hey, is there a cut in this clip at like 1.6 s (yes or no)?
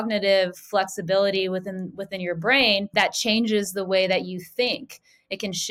no